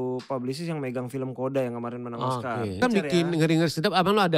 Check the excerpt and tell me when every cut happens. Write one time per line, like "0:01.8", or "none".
0:02.8